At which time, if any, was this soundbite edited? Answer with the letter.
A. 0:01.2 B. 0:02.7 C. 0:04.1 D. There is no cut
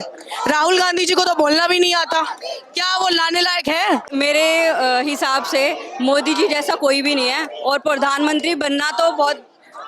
C